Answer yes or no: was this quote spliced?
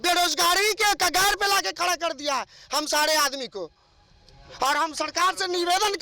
no